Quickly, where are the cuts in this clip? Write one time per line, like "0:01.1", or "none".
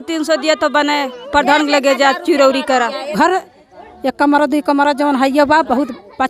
0:03.1